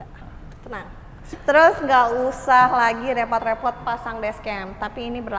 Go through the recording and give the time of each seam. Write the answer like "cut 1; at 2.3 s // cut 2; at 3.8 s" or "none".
cut 1; at 1.1 s